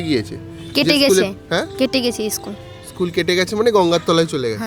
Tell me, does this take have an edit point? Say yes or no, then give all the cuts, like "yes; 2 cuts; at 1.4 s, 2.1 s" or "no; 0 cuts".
no; 0 cuts